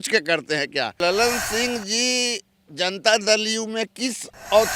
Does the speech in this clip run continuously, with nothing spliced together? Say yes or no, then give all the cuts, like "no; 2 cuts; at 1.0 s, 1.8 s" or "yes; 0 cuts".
no; 1 cut; at 1.0 s